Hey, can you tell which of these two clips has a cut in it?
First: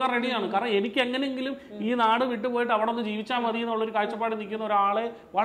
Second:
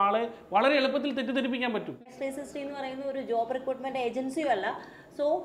second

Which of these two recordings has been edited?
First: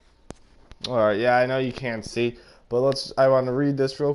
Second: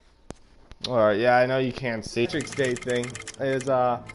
first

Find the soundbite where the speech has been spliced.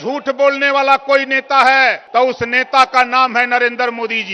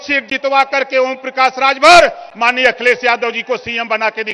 first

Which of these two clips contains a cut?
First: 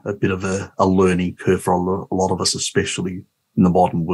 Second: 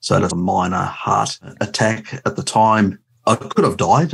second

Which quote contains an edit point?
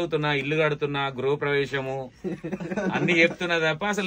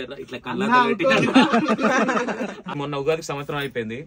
second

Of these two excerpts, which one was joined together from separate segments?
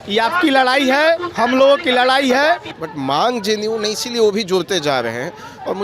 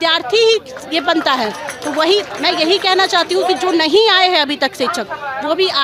first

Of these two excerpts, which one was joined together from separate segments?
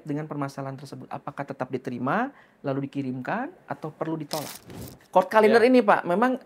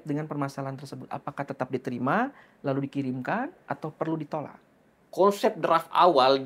first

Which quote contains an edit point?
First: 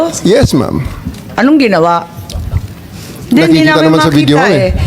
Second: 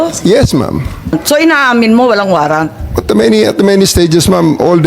second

